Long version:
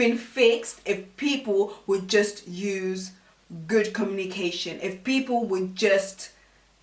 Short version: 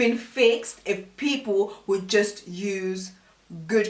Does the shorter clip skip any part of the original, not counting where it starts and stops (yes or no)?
no